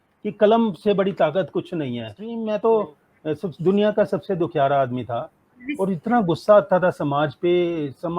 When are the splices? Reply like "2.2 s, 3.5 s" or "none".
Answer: 2.2 s

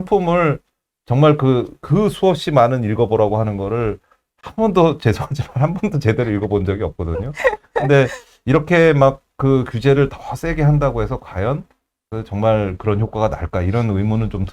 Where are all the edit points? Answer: none

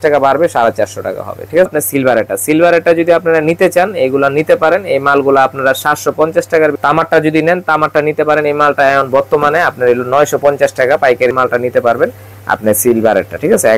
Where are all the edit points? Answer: 1.7 s, 6.7 s, 11.3 s

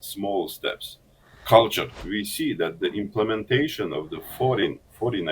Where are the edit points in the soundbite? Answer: 2.0 s

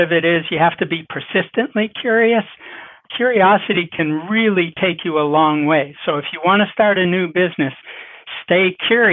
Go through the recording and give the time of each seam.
none

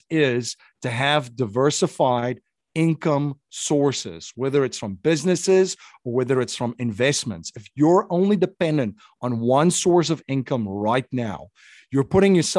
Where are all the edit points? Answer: none

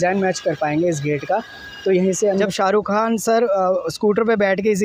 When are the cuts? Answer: 2.4 s

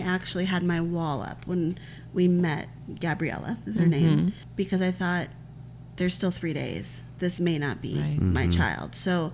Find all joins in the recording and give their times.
none

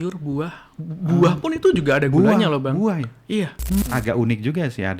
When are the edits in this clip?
3.8 s

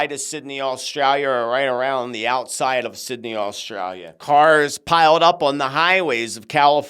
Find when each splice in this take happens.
4.1 s

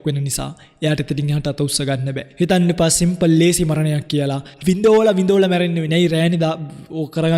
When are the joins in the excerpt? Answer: 2.2 s, 4.6 s

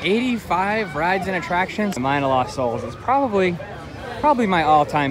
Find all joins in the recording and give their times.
2.0 s

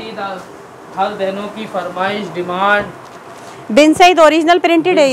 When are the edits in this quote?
none

